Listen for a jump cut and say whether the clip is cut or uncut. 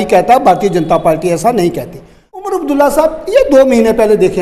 cut